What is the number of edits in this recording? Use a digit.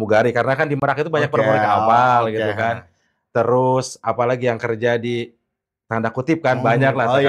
0